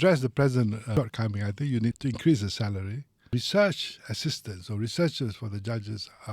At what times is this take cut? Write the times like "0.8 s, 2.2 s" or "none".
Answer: 0.9 s, 2.0 s, 3.3 s